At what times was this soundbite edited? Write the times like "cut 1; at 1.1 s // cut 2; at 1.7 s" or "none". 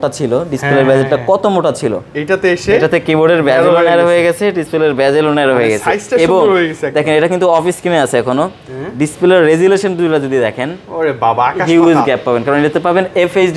none